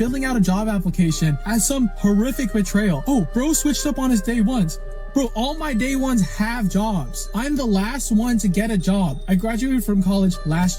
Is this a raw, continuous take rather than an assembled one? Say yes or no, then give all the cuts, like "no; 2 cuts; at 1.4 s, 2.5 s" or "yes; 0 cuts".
yes; 0 cuts